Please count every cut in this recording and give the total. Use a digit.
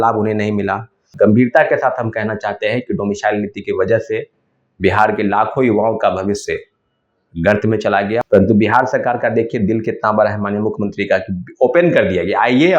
2